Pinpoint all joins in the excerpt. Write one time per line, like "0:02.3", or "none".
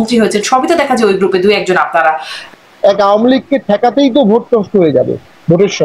0:02.3